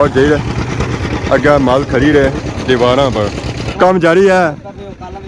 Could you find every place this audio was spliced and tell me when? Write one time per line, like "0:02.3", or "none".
0:03.6